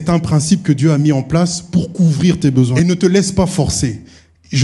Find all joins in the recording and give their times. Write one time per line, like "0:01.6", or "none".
0:02.7